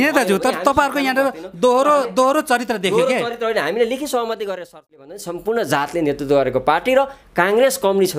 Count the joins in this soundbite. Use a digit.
1